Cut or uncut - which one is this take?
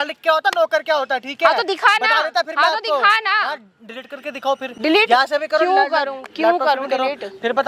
uncut